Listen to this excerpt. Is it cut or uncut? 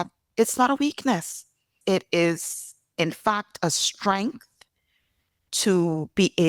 cut